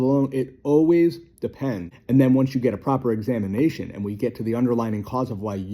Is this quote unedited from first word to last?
no; 1 cut; at 1.9 s

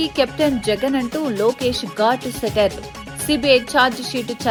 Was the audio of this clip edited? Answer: no; 0 cuts

